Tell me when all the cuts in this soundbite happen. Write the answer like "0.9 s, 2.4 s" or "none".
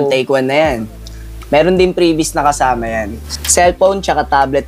3.3 s